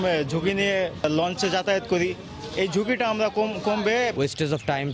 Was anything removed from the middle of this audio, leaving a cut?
yes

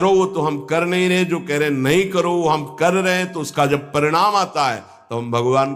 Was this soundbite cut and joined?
no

